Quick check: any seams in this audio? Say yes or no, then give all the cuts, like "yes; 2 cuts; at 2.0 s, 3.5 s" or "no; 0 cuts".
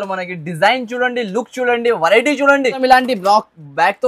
yes; 1 cut; at 2.8 s